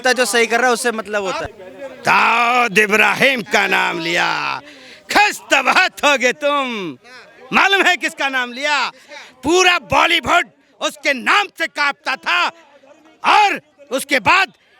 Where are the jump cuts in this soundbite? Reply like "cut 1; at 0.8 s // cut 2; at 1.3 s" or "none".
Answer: cut 1; at 1.5 s